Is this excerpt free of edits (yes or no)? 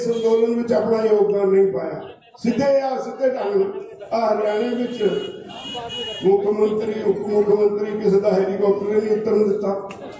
yes